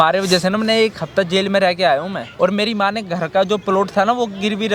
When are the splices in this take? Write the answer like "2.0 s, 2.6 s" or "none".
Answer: 2.3 s